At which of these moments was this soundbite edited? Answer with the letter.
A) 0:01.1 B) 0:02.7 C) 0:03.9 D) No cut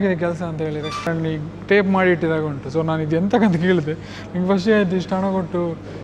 A